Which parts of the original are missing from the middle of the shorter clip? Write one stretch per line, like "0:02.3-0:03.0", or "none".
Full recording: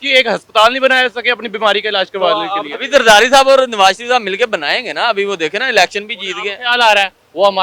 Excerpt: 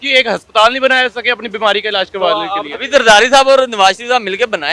none